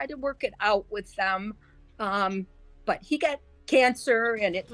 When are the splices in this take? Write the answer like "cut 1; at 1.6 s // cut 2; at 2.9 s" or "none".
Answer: none